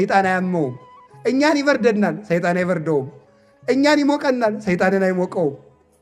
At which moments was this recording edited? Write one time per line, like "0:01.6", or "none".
none